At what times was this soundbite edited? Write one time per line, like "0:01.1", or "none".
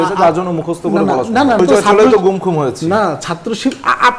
0:01.6